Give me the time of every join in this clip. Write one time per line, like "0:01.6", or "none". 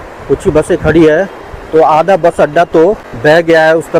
0:03.1